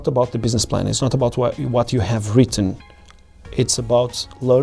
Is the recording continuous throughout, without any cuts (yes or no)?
yes